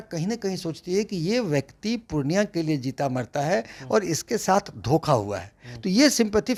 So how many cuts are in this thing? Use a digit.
0